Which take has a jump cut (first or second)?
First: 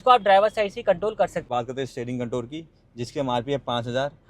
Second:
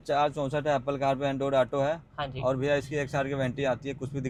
first